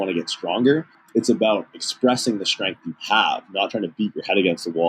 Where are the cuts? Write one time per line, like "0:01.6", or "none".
0:01.0